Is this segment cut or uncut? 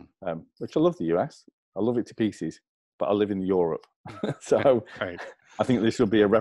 uncut